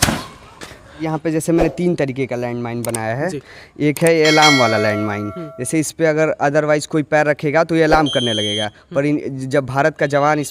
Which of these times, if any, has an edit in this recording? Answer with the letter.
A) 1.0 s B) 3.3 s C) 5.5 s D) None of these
A